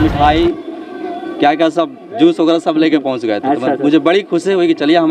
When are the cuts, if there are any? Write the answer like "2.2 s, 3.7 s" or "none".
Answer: none